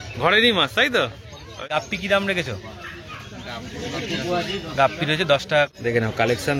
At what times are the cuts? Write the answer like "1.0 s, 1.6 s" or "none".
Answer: 1.7 s, 5.7 s